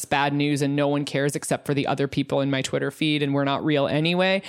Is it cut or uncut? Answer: uncut